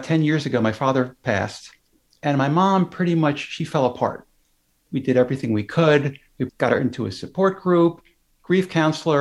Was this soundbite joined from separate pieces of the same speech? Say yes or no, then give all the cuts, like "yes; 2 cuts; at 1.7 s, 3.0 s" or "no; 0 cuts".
yes; 2 cuts; at 4.8 s, 6.4 s